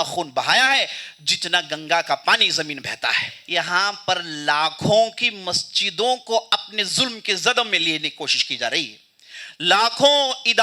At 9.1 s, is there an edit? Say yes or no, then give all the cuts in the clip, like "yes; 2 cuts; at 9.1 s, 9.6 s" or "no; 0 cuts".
no; 1 cut; at 3.3 s